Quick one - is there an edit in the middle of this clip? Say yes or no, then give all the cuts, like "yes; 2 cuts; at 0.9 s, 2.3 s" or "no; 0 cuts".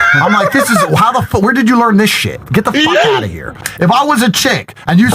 yes; 1 cut; at 3.7 s